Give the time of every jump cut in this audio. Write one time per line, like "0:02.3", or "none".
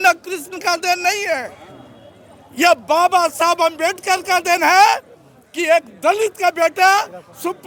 none